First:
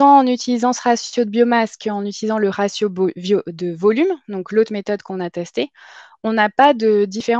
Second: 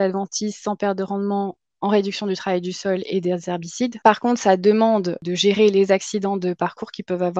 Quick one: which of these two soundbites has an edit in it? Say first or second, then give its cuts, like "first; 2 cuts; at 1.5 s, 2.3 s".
second; 2 cuts; at 4.0 s, 5.2 s